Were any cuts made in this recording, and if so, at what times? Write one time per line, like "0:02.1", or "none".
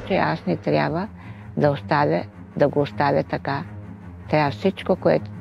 none